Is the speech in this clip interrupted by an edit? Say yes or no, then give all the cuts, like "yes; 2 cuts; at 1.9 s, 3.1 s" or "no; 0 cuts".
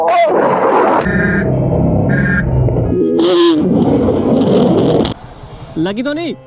no; 0 cuts